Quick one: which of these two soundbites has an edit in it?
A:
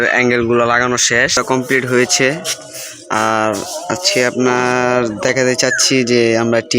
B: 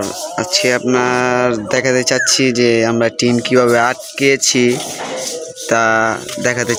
A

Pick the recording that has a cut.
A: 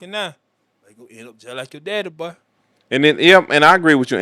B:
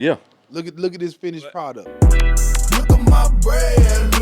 B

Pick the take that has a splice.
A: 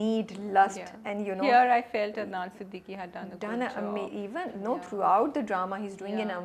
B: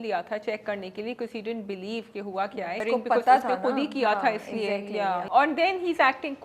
B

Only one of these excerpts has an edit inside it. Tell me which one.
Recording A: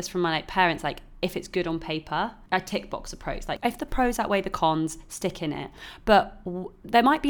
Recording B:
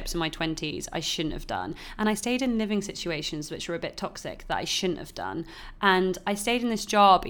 A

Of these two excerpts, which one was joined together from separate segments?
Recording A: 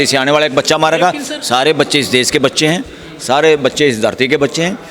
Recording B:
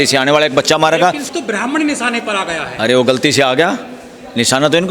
B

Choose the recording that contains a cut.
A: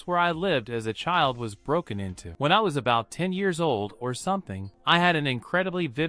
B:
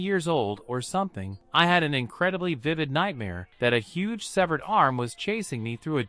A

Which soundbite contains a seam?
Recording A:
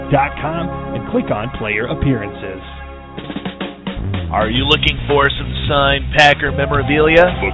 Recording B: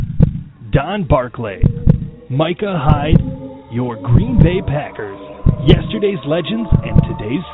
A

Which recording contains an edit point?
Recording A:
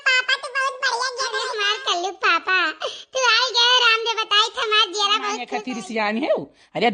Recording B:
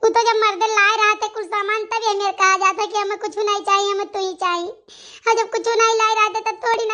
A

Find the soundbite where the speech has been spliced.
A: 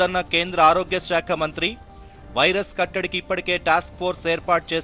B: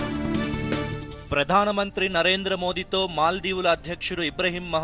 B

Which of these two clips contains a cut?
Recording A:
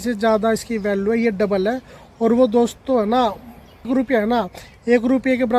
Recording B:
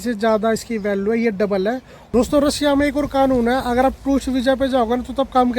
B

